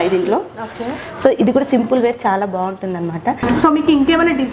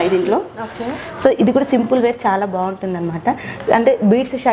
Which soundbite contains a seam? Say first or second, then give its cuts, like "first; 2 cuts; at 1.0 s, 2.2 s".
first; 1 cut; at 3.4 s